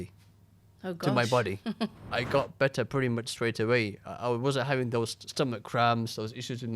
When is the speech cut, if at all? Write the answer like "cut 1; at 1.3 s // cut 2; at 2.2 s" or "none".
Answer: cut 1; at 2.0 s